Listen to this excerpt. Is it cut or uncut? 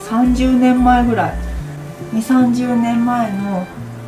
uncut